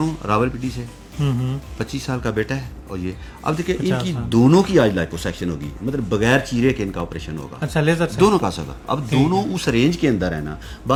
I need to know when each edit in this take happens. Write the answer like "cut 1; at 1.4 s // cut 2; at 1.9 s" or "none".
none